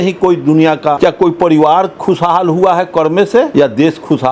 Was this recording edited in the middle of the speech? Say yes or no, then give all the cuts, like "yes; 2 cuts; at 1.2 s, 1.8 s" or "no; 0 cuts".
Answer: yes; 2 cuts; at 1.0 s, 3.5 s